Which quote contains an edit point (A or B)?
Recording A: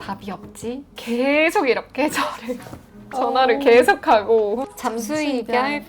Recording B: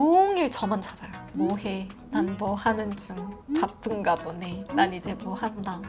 A